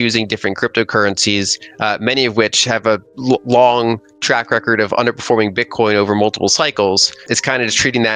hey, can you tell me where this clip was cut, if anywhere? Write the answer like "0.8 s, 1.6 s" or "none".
3.1 s, 7.2 s